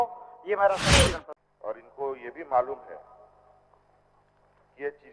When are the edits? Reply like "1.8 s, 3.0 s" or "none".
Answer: 1.3 s